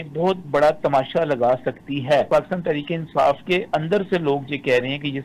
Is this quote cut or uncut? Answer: cut